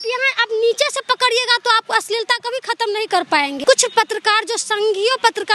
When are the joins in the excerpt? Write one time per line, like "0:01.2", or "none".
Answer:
0:03.6